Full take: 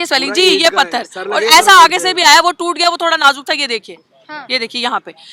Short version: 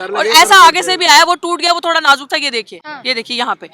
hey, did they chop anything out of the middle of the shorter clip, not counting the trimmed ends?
yes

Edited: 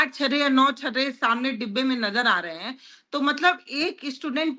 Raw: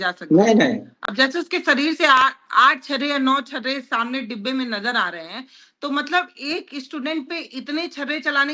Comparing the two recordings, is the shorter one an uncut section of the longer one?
yes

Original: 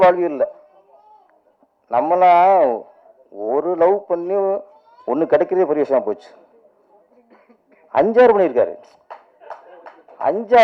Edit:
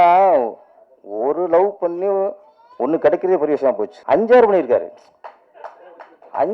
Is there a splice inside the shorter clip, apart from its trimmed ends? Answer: yes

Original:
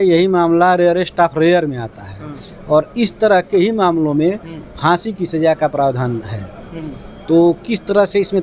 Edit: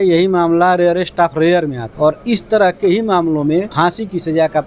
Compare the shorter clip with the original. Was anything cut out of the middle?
yes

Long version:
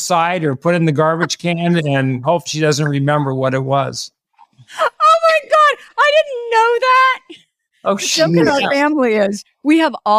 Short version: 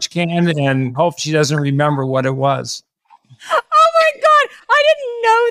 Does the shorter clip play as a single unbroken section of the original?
yes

